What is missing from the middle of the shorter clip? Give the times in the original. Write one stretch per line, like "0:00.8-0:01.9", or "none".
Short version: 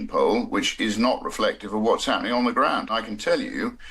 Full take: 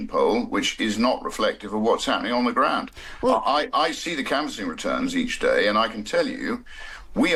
0:03.0-0:05.9